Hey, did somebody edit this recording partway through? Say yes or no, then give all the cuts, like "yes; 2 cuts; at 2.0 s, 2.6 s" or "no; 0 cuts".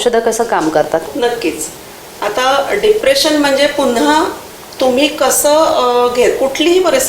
yes; 1 cut; at 1.1 s